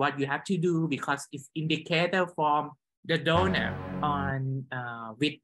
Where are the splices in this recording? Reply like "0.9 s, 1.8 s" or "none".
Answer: 3.8 s